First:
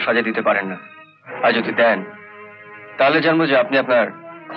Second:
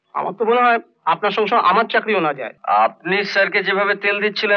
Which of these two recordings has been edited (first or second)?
second